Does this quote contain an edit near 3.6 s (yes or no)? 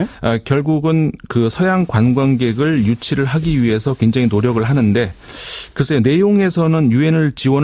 no